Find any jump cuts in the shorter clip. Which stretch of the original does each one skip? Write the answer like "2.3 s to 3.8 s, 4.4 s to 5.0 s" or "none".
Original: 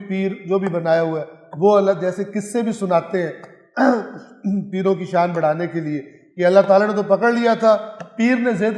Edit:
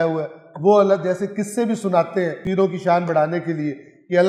3.4 s to 4.7 s